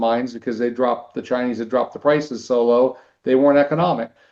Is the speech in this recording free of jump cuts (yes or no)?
yes